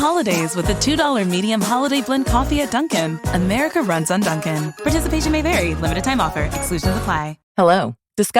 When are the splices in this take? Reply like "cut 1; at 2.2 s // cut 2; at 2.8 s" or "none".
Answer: cut 1; at 7.3 s